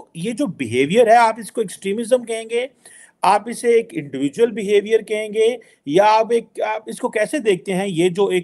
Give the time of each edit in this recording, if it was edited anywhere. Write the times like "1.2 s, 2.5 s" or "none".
none